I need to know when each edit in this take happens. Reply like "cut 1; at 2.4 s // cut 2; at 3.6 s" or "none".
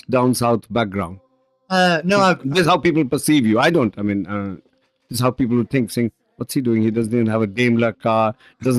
none